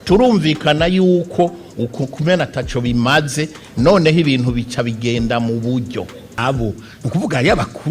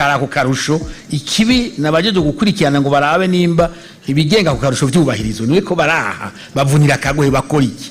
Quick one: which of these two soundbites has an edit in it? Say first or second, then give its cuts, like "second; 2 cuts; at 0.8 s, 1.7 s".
first; 1 cut; at 6.4 s